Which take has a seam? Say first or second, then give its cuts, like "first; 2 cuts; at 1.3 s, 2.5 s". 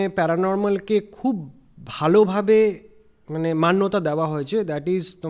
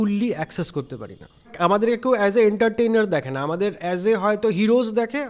second; 1 cut; at 1.5 s